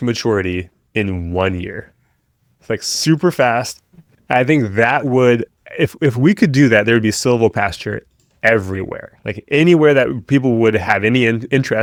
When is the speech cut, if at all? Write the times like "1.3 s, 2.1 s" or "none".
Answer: none

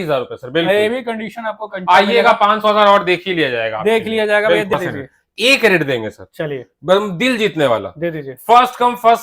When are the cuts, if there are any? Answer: 4.7 s

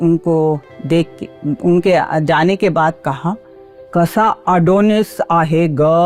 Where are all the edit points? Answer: none

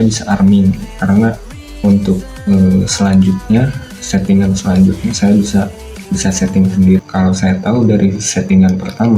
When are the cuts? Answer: 7.0 s

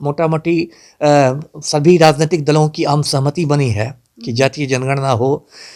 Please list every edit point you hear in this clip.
none

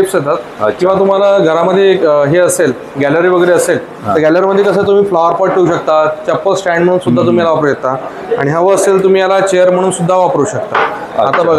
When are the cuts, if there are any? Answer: none

